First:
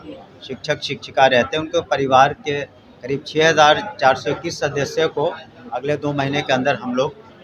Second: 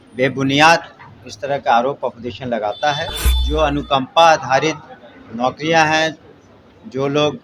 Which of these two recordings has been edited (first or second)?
second